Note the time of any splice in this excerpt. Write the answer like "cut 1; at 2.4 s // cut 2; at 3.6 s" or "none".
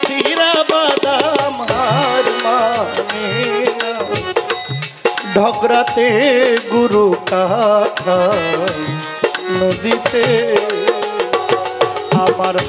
none